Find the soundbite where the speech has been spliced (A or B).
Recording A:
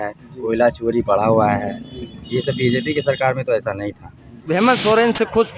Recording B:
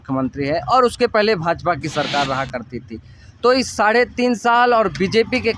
A